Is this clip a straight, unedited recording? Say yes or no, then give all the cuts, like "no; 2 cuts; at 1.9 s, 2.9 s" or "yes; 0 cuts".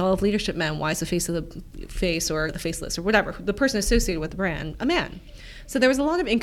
yes; 0 cuts